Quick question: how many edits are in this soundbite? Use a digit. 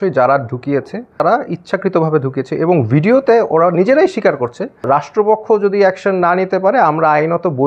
2